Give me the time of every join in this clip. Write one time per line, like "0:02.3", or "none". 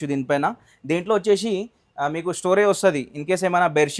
none